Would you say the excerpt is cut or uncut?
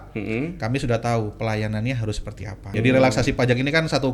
cut